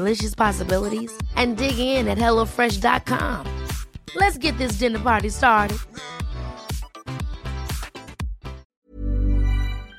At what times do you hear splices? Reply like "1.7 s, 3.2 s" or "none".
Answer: 8.7 s